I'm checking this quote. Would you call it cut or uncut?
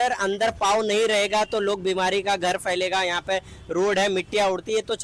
uncut